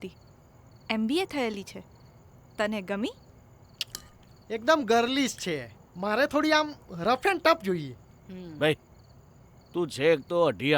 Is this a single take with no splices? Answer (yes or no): no